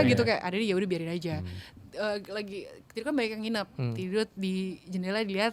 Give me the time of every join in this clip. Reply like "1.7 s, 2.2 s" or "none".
none